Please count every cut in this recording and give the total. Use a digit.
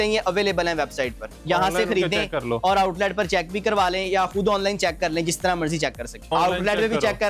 2